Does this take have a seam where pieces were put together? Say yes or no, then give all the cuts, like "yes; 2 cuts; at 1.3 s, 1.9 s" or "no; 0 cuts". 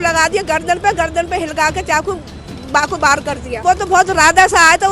yes; 1 cut; at 3.6 s